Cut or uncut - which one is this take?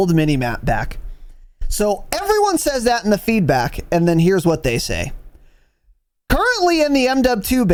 uncut